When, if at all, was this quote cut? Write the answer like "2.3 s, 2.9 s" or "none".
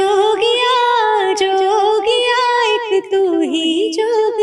none